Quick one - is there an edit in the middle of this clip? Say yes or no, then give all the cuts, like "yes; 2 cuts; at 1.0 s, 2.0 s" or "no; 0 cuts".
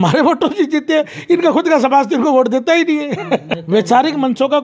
yes; 1 cut; at 3.5 s